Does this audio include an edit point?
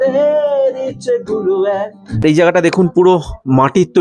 yes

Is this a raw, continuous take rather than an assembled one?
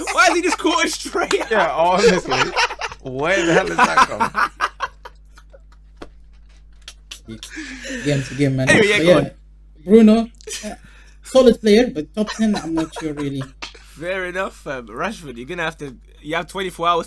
yes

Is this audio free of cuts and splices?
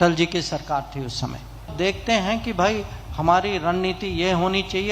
no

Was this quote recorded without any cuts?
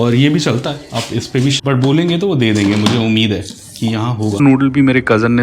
no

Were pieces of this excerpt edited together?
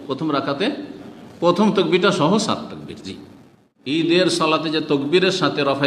yes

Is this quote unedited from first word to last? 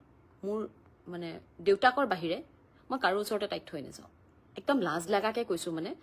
yes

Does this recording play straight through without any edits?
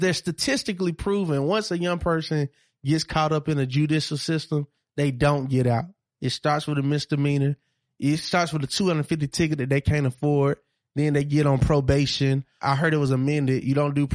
no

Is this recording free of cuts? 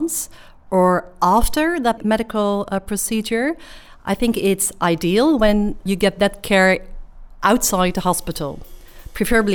no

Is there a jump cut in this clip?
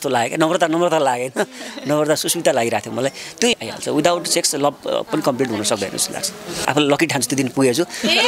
yes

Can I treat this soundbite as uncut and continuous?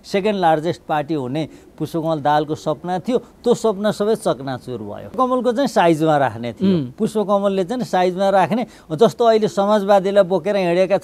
no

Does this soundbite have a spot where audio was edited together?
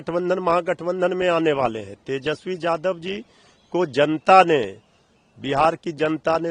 no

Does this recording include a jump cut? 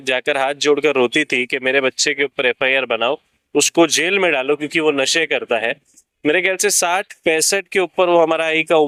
no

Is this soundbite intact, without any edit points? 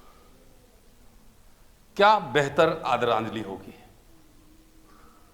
yes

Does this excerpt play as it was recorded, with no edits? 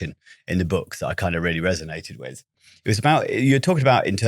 no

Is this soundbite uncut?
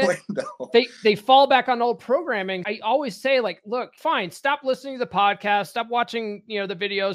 no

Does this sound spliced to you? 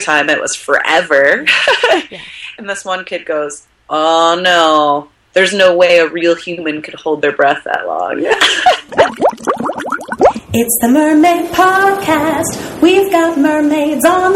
yes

